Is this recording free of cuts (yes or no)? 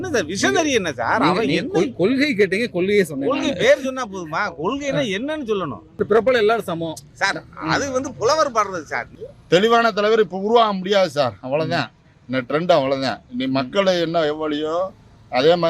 no